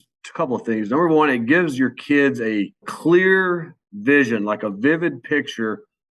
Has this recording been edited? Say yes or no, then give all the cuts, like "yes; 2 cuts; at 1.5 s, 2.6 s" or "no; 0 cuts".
yes; 1 cut; at 2.9 s